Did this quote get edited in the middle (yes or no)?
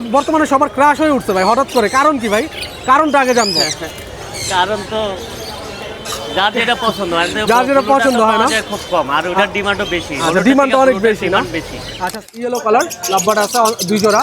yes